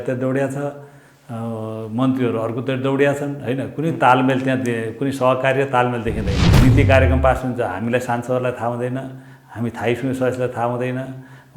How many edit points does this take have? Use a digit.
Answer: 1